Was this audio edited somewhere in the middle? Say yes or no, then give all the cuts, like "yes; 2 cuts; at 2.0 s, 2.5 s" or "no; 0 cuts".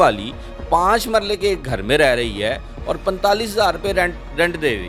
no; 0 cuts